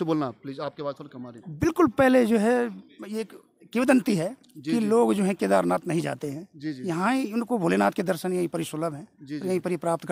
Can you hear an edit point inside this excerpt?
no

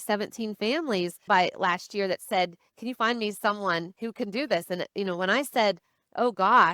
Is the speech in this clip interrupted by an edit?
yes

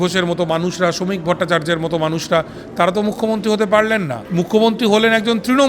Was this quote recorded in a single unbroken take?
no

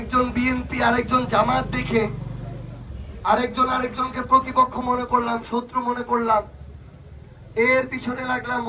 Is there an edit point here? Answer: no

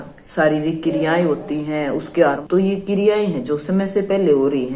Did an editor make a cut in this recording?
yes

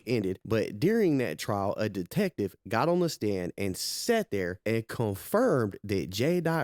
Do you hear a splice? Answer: no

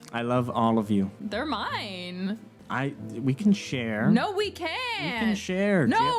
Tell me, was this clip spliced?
yes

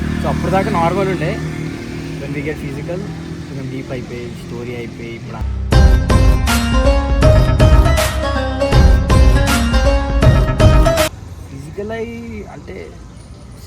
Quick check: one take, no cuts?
no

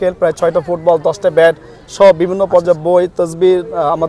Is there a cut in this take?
no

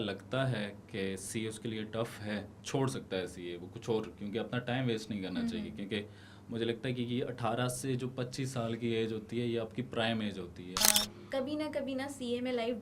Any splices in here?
yes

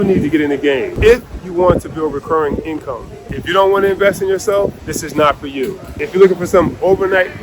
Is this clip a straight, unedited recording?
no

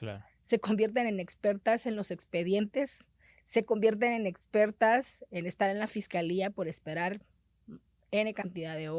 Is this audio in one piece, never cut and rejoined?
yes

